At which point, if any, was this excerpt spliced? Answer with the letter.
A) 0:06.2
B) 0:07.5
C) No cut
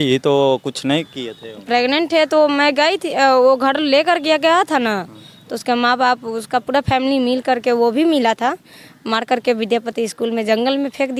C